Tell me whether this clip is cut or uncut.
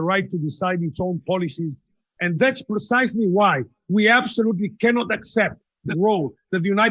cut